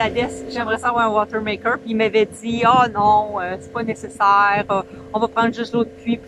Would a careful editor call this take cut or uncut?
uncut